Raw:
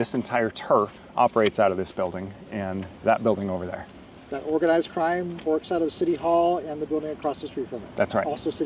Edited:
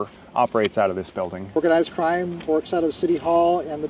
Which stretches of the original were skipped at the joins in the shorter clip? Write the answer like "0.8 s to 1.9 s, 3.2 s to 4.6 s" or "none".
2.3 s to 4.5 s